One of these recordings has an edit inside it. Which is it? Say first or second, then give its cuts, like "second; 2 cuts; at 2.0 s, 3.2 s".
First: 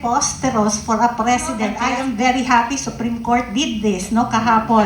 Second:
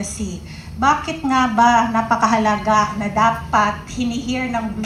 first; 1 cut; at 1.8 s